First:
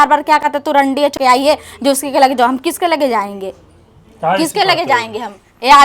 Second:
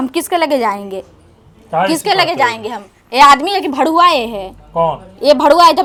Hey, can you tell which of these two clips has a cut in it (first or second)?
first